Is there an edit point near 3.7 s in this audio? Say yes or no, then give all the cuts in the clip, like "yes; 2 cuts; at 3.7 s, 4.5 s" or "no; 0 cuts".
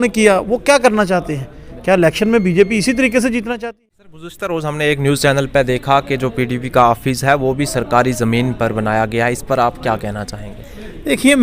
yes; 1 cut; at 3.7 s